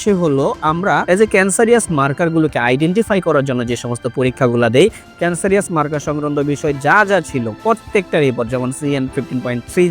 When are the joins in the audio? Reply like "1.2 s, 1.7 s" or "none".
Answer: 1.0 s